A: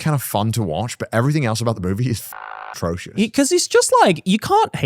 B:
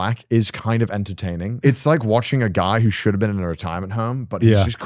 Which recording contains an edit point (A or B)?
B